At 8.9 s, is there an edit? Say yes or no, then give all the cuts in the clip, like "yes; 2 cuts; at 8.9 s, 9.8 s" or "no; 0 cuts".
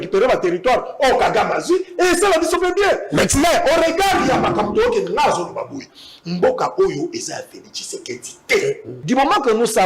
yes; 1 cut; at 8.9 s